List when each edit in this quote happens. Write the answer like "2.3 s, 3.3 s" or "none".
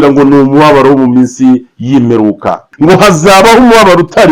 2.6 s

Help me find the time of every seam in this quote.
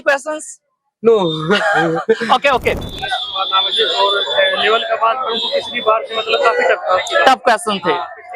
2.9 s

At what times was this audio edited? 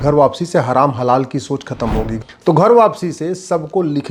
2.1 s

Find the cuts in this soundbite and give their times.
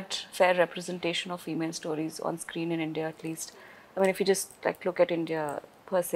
none

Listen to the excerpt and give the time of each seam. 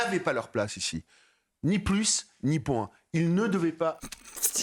none

